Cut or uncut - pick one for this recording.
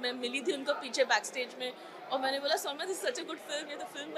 uncut